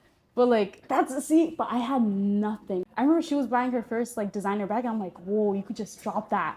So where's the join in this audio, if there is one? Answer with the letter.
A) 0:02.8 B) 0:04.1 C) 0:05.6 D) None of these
A